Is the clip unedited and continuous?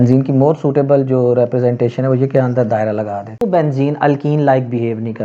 no; 1 cut; at 3.4 s

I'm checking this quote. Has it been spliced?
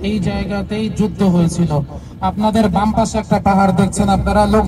no; 0 cuts

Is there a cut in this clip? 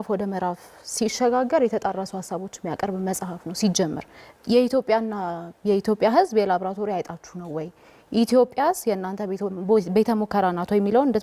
no; 0 cuts

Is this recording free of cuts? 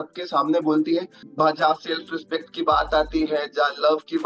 no; 1 cut; at 1.2 s

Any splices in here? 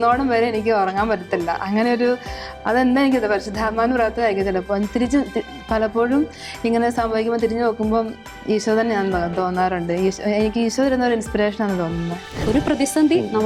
yes; 1 cut; at 12.4 s

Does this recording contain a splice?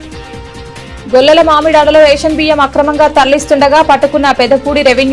yes; 1 cut; at 1.0 s

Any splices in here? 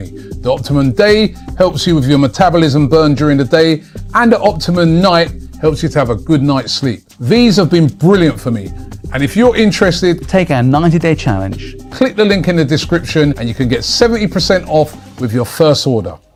no; 0 cuts

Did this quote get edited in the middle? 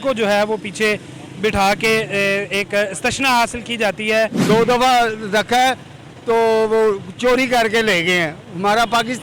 yes; 1 cut; at 4.4 s

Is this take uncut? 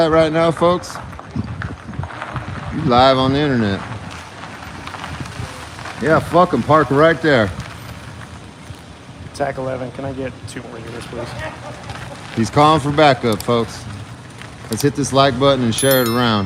yes; 0 cuts

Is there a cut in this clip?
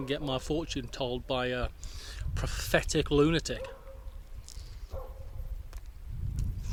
no; 0 cuts

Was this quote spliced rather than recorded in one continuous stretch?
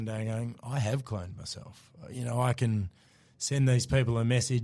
no; 0 cuts

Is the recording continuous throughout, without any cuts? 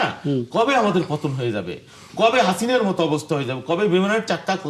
yes; 0 cuts

